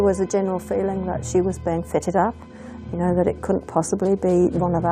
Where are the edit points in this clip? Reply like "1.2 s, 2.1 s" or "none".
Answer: none